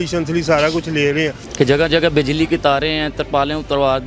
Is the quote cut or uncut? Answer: cut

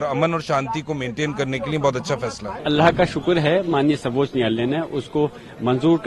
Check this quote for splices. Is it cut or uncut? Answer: cut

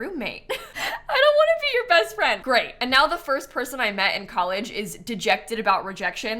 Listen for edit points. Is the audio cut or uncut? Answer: cut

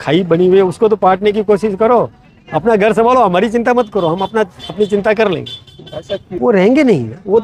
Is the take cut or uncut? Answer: uncut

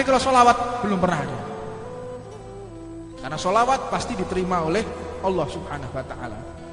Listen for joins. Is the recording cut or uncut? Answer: uncut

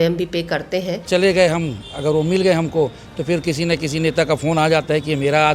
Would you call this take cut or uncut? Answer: cut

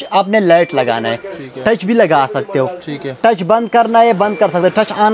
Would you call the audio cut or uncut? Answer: uncut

